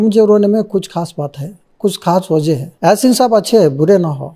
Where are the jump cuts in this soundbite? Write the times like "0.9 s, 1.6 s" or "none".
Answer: 2.7 s